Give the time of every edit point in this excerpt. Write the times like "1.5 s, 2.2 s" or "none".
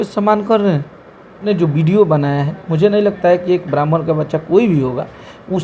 1.4 s